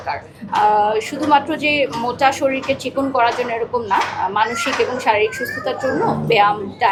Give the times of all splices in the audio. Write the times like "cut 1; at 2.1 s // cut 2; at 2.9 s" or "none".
none